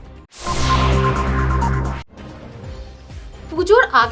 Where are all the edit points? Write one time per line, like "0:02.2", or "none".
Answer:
0:03.0